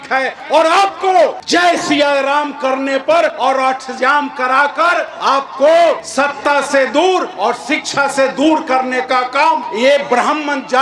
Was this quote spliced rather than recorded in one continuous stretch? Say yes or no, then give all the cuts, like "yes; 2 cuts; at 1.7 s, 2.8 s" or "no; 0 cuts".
yes; 6 cuts; at 1.4 s, 3.3 s, 5.1 s, 6.1 s, 7.3 s, 9.7 s